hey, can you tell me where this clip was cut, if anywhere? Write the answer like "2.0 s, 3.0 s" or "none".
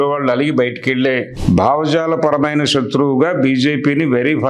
1.3 s